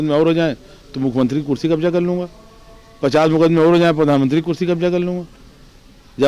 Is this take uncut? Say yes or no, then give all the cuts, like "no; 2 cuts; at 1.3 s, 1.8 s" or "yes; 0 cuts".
yes; 0 cuts